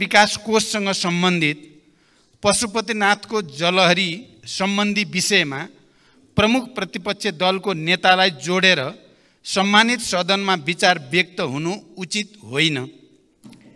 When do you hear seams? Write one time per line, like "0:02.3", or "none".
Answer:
none